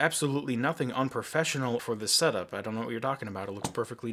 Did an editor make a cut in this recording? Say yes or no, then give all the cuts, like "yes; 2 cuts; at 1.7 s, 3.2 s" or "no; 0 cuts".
yes; 1 cut; at 1.8 s